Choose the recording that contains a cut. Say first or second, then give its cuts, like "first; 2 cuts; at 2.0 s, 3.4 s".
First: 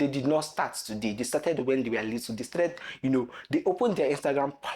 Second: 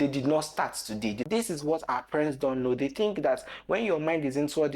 second; 1 cut; at 1.2 s